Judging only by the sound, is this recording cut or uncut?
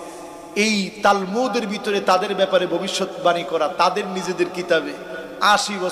uncut